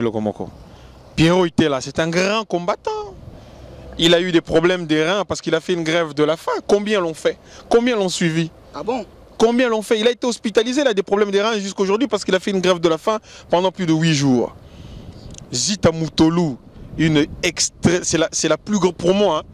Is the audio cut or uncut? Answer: uncut